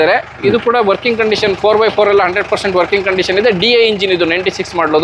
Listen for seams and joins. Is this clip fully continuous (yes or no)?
yes